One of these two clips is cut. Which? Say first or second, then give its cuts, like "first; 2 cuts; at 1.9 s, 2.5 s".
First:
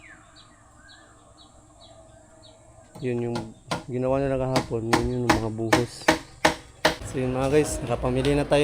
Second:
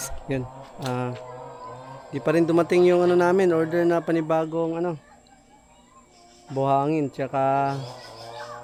first; 1 cut; at 7.0 s